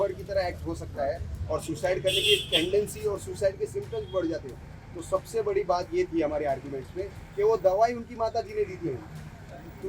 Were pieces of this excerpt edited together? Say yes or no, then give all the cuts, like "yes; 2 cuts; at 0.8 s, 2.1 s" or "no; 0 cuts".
no; 0 cuts